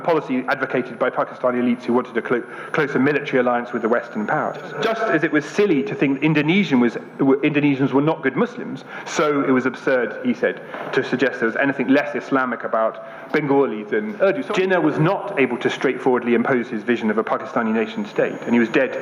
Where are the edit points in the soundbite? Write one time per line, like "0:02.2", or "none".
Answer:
0:04.7
0:14.4